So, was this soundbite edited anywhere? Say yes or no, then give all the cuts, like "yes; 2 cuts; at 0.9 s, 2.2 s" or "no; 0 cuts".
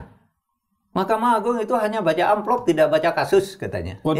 no; 0 cuts